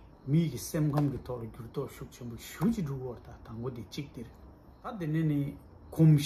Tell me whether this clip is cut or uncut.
cut